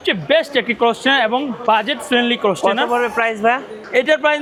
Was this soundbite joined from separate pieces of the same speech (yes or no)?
no